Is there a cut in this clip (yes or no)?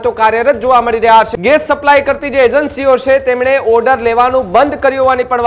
yes